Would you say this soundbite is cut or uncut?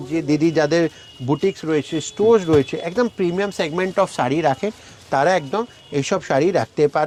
uncut